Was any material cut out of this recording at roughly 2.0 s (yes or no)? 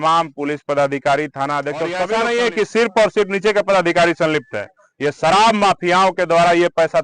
yes